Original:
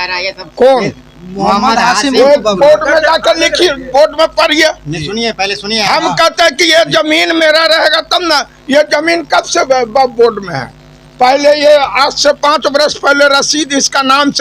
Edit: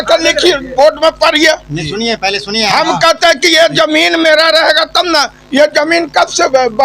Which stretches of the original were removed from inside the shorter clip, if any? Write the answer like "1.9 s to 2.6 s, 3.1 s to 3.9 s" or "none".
none

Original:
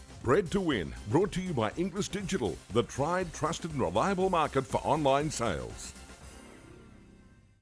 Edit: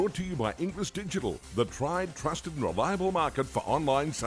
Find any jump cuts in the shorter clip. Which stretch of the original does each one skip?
none

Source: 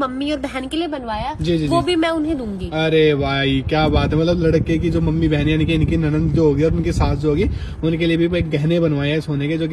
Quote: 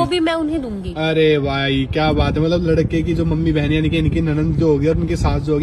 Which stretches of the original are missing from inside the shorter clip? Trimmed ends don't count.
none

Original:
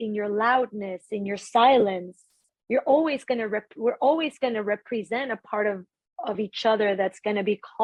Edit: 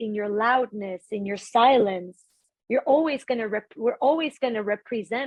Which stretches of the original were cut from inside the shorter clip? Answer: none

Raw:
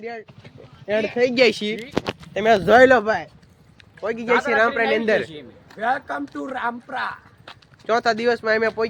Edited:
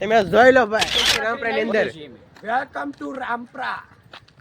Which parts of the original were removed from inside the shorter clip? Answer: 3.5 s to 4.5 s

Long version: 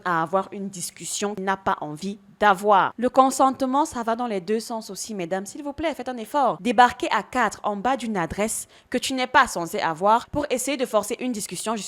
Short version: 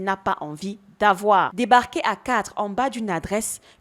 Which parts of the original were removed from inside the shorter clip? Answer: 2.9 s to 6.6 s

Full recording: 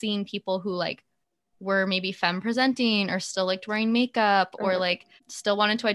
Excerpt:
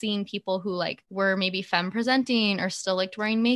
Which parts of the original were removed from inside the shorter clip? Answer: 1.0 s to 1.5 s

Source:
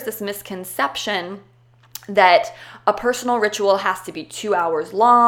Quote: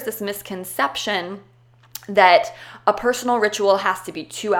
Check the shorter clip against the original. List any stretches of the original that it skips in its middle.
none

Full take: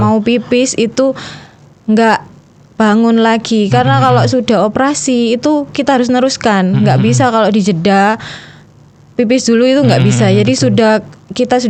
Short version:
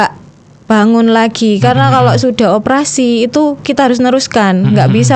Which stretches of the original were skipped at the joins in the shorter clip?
none

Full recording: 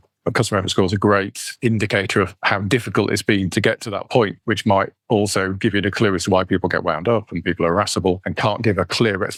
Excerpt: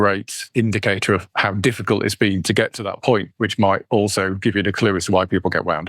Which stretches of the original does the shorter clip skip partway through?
4.9 s to 5.0 s

